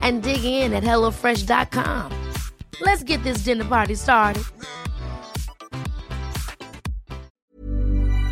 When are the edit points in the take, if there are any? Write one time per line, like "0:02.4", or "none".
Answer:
0:07.4